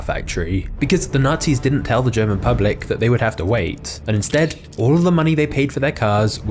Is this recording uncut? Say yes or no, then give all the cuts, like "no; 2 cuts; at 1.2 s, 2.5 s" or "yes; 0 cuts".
no; 1 cut; at 4.3 s